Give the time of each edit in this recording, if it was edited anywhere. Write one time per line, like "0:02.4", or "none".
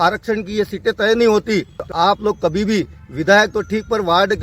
0:01.8